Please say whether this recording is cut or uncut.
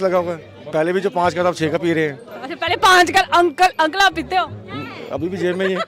uncut